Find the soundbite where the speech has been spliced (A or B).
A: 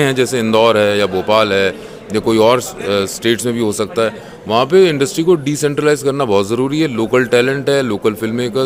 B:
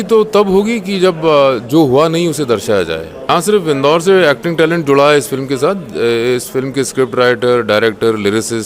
B